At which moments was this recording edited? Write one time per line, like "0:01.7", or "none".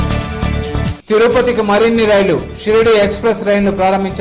0:00.9